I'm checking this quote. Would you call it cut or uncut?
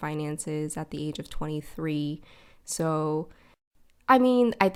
uncut